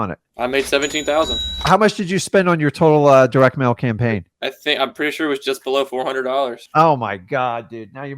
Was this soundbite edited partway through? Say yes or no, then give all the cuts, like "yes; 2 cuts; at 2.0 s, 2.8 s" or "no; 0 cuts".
yes; 1 cut; at 1.5 s